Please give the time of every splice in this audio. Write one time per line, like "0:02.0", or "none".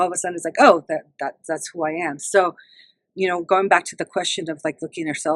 none